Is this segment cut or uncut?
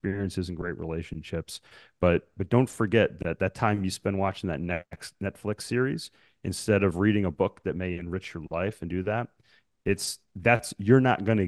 uncut